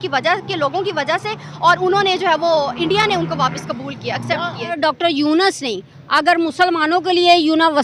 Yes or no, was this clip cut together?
yes